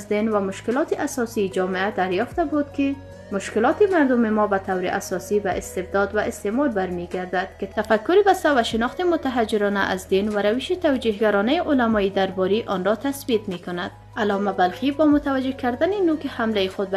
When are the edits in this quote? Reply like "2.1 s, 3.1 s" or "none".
none

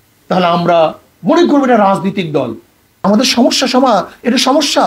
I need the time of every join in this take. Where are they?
3.0 s

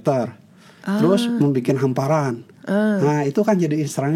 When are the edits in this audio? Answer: none

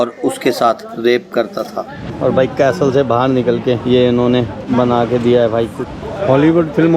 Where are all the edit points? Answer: 2.0 s, 5.9 s

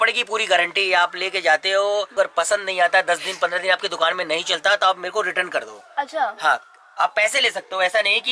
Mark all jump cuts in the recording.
2.1 s

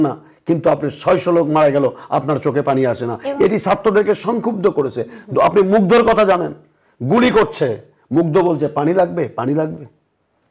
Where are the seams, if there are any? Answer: none

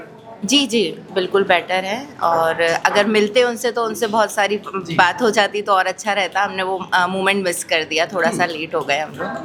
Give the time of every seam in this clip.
none

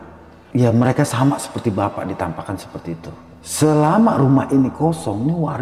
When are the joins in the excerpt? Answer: 3.2 s

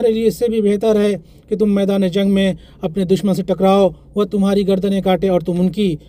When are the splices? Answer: none

